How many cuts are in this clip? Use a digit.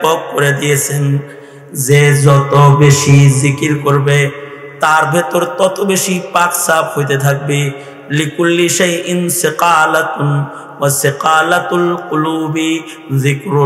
0